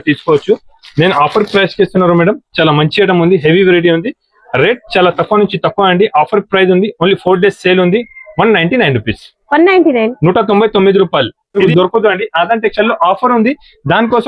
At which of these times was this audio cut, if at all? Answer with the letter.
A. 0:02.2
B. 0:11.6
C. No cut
B